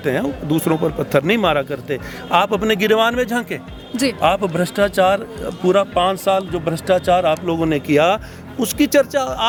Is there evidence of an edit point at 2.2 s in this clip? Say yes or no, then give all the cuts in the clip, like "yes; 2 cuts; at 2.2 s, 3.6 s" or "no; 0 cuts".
no; 0 cuts